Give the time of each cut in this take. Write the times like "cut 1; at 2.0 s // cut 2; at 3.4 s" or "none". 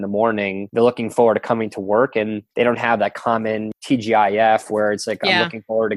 cut 1; at 3.7 s